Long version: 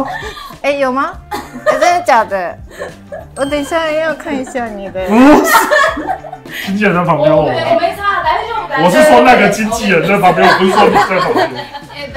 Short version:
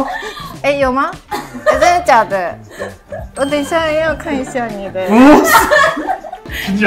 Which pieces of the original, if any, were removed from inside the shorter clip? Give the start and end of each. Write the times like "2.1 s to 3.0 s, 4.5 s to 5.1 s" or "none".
none